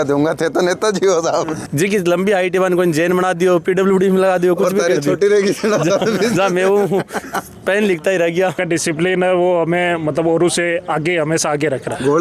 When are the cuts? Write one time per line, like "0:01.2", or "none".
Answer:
0:01.6
0:08.6